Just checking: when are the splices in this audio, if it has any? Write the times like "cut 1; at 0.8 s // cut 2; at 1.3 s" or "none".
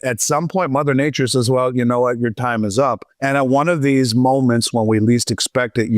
cut 1; at 3.1 s